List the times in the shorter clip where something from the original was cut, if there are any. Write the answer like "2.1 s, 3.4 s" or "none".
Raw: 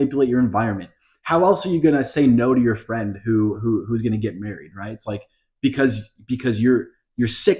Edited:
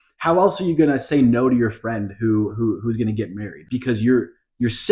3.5 s